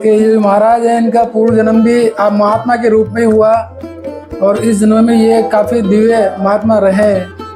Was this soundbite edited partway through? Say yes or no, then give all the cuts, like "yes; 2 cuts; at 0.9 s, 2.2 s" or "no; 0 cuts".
no; 0 cuts